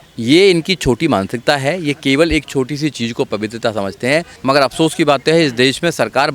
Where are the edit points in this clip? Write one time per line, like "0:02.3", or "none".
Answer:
0:04.3